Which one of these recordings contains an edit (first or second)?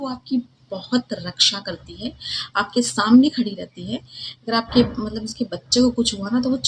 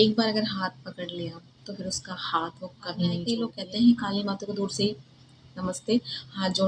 second